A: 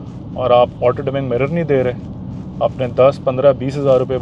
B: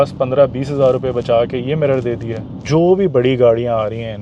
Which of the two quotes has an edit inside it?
B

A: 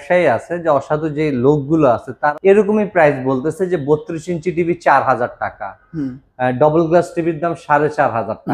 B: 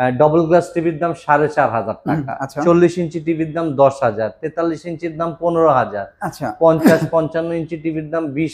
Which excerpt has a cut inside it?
A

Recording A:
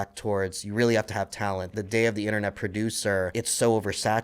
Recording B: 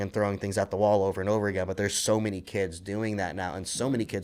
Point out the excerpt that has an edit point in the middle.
A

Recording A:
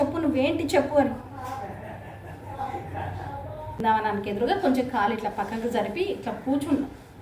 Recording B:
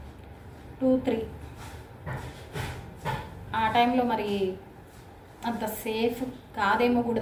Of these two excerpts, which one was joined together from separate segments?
A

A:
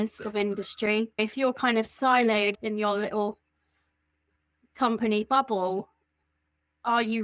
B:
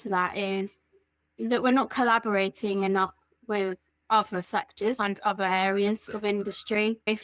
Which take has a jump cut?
B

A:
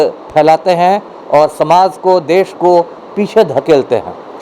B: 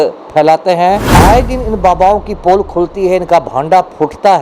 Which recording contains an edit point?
B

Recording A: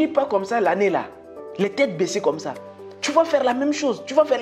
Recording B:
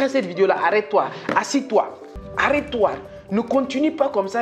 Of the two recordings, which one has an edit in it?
B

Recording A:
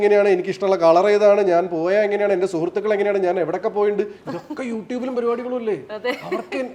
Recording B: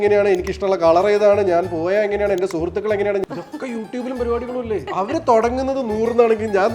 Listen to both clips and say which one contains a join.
B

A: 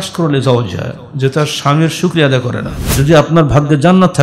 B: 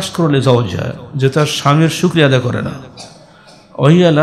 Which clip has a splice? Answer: A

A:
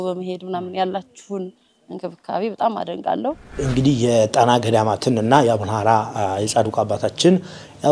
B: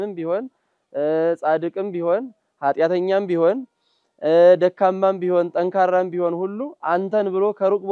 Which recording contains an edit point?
A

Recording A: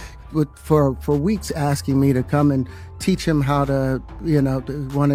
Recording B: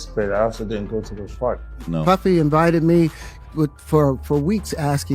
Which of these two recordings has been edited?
B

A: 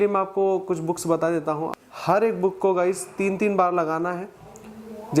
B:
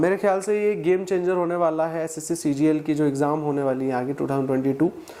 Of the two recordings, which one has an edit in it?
A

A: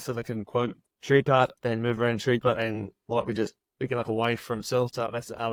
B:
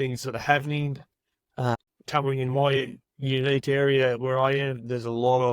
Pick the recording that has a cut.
B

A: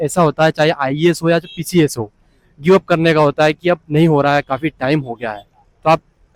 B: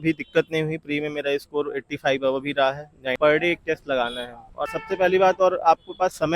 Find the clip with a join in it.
B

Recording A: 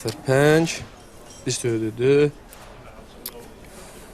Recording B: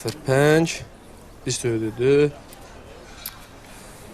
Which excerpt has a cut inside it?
B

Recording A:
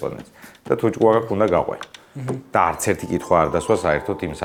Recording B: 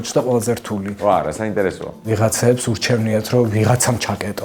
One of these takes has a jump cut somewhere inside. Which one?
B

